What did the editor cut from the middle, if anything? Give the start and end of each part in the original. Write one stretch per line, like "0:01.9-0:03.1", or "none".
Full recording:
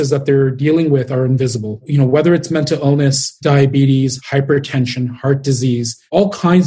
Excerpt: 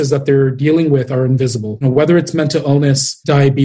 0:01.8-0:01.9